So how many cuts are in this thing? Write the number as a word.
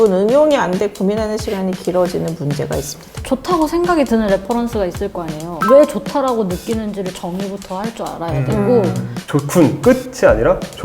two